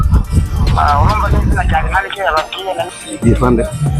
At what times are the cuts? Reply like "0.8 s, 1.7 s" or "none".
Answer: 2.9 s